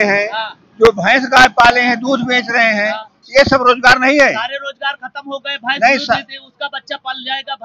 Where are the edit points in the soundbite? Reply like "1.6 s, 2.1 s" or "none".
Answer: none